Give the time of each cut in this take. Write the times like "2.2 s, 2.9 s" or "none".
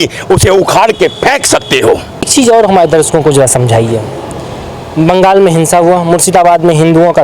none